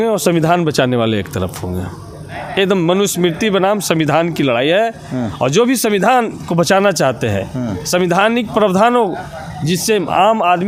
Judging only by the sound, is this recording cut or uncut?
uncut